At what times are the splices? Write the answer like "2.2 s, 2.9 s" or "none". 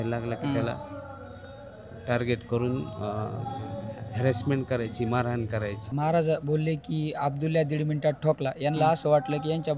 5.9 s

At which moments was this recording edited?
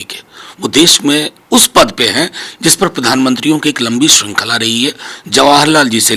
none

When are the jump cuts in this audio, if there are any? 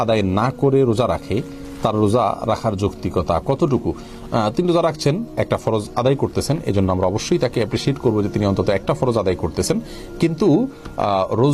none

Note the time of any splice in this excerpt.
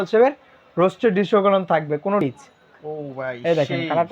2.2 s

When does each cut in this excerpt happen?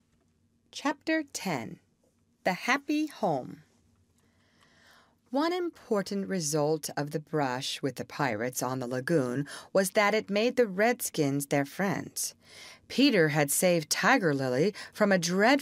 10.3 s

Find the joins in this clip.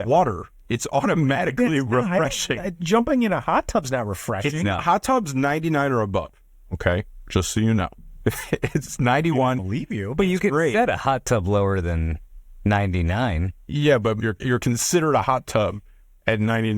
8.0 s, 14.2 s

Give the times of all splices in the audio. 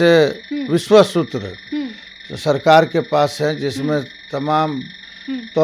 none

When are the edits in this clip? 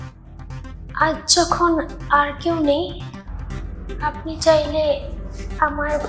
none

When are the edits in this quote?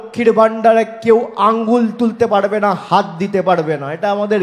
none

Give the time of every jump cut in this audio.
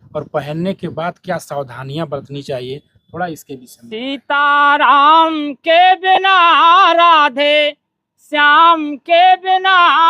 4.0 s

